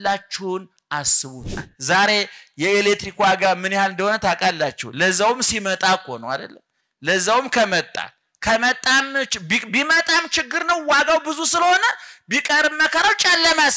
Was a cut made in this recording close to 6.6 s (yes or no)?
no